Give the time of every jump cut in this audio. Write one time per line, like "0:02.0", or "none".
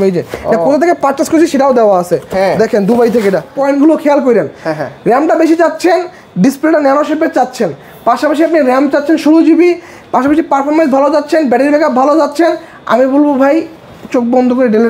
0:03.5